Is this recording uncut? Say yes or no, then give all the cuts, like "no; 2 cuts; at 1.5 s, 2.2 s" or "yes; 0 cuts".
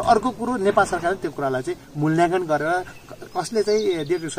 yes; 0 cuts